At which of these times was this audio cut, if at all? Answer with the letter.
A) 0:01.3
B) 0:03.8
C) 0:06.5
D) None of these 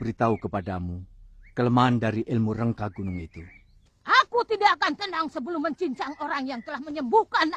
B